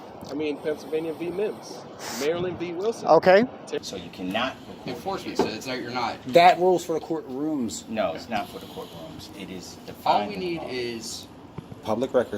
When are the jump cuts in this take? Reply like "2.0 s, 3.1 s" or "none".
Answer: 3.9 s